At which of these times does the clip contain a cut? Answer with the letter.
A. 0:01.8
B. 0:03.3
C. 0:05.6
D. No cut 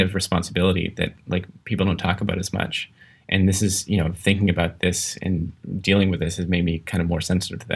D